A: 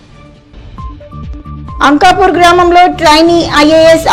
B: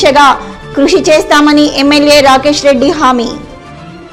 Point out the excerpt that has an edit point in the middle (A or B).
A